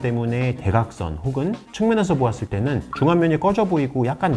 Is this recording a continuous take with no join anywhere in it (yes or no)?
yes